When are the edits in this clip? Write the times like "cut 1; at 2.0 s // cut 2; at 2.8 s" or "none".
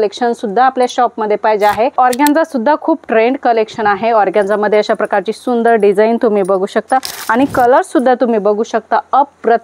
cut 1; at 1.9 s // cut 2; at 7.2 s

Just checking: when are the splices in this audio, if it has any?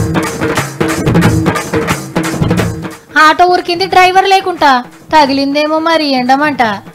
cut 1; at 1.0 s

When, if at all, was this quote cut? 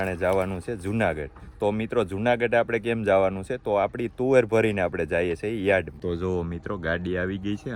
none

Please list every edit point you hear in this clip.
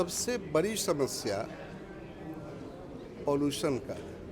none

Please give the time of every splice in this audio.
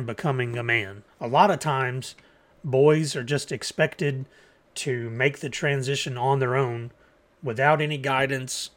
cut 1; at 1.0 s

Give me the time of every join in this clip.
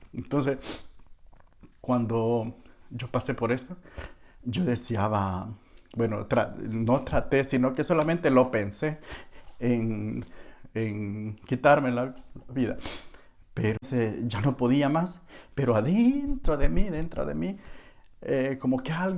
cut 1; at 13.8 s

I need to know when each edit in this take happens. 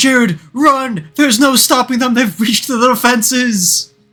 none

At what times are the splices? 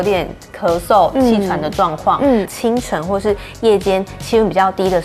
cut 1; at 2.5 s

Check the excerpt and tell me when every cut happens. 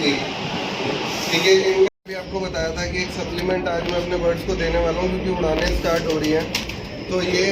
cut 1; at 1.9 s

